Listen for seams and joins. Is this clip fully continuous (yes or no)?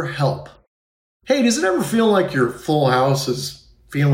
yes